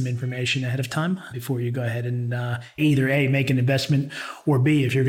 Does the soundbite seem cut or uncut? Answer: cut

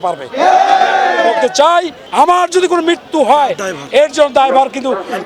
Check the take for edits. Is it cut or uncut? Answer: cut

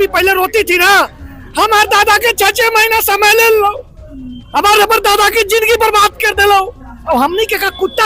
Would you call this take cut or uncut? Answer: uncut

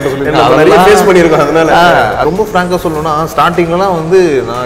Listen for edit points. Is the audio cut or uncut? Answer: cut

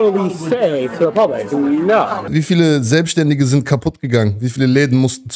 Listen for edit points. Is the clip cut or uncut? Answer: cut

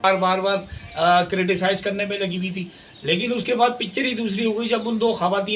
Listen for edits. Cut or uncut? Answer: uncut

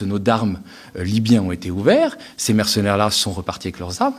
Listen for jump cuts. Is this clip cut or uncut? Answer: uncut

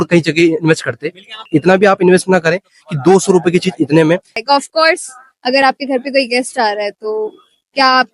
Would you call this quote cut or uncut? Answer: cut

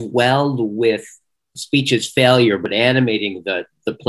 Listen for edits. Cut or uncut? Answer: cut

